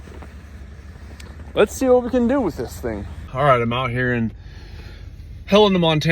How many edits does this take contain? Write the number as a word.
one